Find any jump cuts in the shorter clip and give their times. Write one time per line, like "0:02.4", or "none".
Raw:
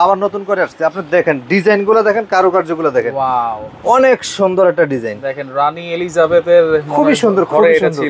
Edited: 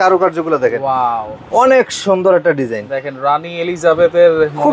none